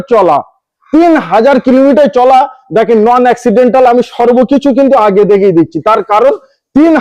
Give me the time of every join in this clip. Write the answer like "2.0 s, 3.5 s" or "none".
none

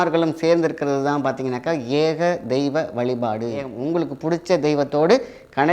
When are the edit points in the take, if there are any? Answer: 3.7 s

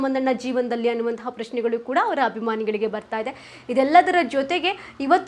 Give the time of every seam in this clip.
none

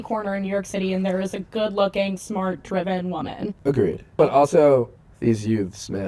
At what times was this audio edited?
3.9 s, 5.0 s

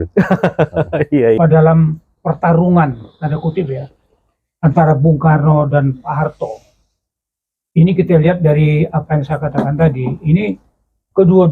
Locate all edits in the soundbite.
1.4 s

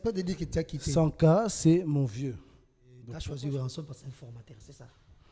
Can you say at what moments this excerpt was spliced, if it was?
3.1 s

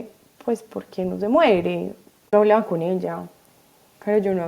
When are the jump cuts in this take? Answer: 2.3 s

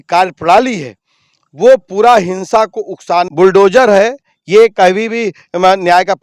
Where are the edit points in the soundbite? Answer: 3.3 s

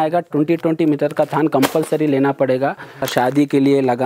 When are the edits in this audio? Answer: 3.1 s

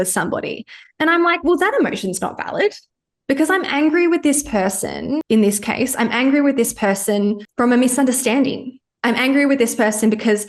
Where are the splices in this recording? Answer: 5.2 s

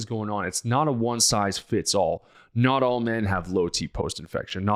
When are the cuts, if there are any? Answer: none

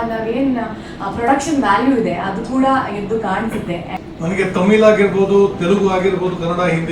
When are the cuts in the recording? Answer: 3.9 s

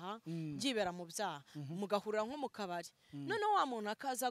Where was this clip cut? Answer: none

